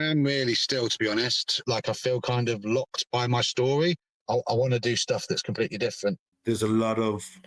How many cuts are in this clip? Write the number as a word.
three